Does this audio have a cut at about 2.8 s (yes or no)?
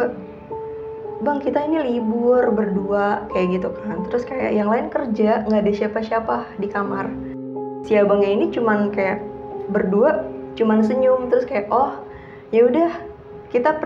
no